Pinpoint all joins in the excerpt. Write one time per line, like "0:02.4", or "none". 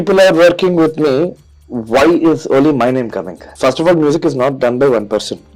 0:03.5